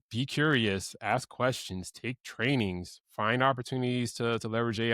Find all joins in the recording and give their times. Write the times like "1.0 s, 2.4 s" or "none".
none

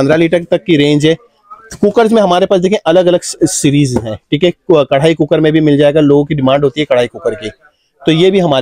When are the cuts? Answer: none

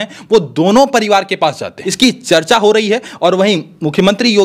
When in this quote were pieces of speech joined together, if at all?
1.8 s

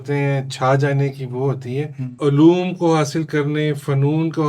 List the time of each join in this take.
2.1 s

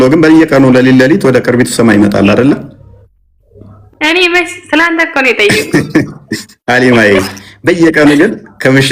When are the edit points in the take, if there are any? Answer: none

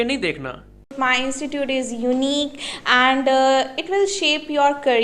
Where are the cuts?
0.9 s

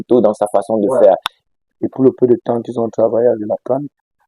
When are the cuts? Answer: 1.4 s

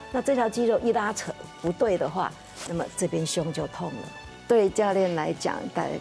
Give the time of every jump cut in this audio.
4.2 s

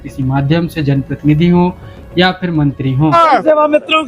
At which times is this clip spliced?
3.1 s

